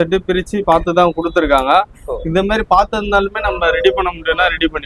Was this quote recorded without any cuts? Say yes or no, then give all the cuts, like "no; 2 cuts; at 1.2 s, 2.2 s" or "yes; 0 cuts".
yes; 0 cuts